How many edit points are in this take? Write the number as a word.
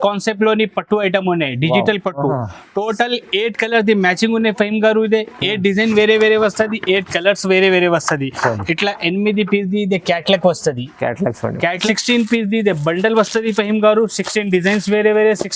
one